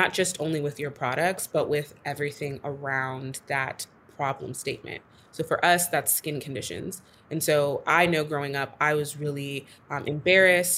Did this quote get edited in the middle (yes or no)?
no